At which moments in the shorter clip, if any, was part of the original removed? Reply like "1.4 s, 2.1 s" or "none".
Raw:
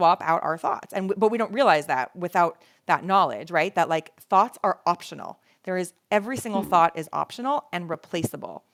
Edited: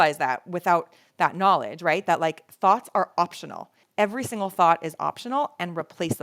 3.8 s